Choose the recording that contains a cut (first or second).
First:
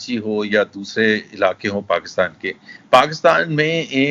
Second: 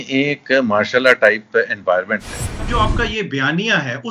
second